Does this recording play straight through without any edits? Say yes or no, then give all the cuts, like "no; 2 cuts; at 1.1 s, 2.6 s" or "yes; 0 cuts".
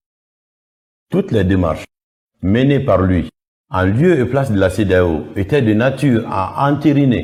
yes; 0 cuts